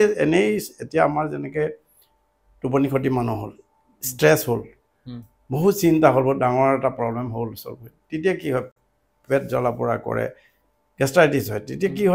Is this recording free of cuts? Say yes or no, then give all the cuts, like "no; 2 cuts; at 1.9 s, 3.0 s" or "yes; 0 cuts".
yes; 0 cuts